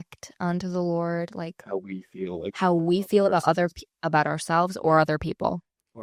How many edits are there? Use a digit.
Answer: 0